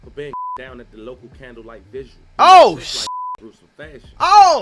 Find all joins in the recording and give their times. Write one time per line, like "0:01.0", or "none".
0:02.2